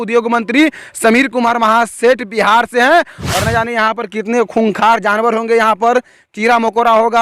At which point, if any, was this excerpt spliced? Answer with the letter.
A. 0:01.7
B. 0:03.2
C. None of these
B